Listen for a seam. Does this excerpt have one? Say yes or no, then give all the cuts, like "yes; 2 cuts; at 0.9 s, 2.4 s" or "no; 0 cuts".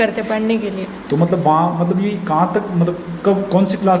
no; 0 cuts